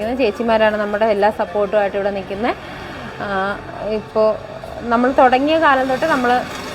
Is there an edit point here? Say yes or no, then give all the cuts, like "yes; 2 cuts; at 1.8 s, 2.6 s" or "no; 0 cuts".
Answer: no; 0 cuts